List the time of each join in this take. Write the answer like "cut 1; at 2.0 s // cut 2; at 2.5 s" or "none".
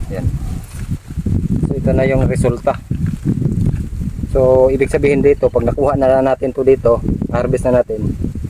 none